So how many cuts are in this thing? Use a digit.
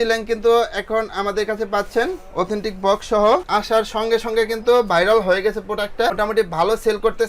0